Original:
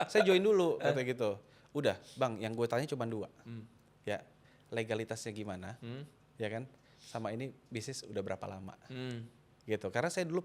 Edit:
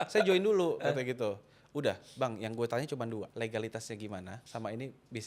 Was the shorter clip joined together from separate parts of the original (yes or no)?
yes